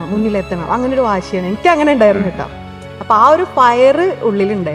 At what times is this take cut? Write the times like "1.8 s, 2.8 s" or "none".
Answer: none